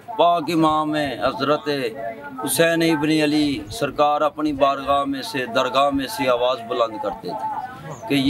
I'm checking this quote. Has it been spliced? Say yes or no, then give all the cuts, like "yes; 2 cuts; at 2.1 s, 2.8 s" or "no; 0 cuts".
no; 0 cuts